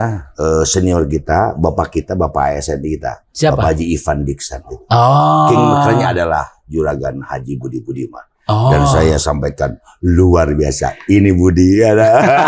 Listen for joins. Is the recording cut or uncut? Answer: uncut